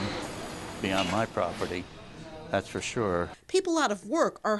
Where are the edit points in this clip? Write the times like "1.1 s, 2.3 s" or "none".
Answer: 3.4 s